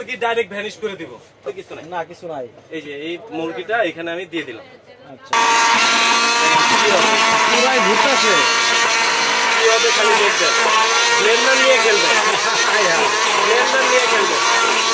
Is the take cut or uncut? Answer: cut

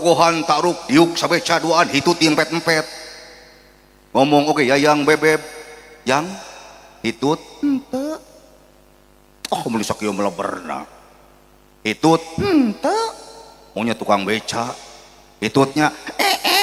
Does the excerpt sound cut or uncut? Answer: uncut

